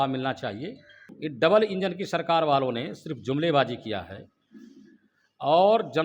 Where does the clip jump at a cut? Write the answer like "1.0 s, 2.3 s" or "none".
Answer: 1.1 s